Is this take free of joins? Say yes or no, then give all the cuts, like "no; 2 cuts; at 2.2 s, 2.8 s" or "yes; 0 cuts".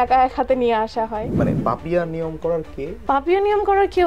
no; 2 cuts; at 1.3 s, 2.9 s